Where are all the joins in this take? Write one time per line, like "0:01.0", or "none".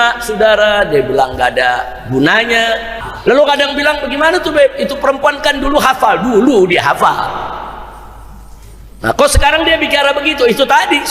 0:02.9